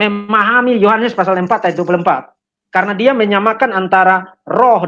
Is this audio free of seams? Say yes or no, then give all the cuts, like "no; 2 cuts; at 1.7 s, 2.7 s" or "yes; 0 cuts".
yes; 0 cuts